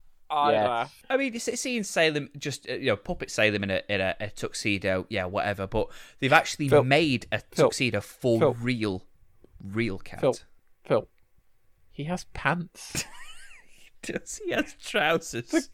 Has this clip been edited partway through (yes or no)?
yes